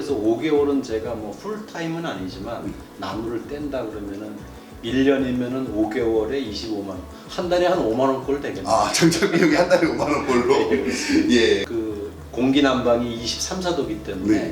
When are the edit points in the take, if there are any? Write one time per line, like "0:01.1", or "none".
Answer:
0:11.7